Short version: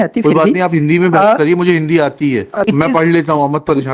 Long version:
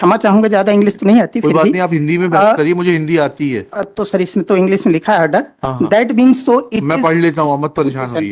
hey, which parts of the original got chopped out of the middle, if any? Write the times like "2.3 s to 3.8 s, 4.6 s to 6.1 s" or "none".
3.9 s to 6.8 s